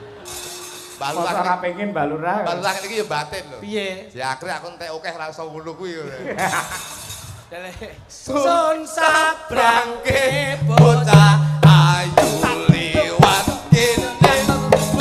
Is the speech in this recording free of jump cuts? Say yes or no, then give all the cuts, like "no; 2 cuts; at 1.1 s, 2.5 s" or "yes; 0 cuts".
yes; 0 cuts